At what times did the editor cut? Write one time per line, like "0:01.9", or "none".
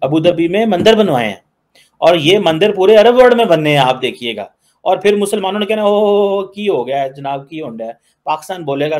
none